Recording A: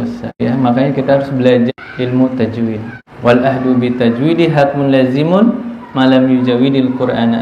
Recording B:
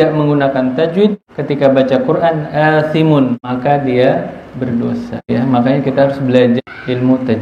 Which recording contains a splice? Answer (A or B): B